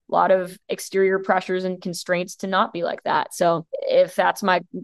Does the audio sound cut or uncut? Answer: cut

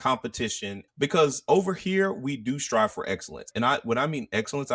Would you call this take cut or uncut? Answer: cut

